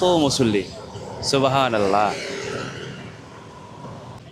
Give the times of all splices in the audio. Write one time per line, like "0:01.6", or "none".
none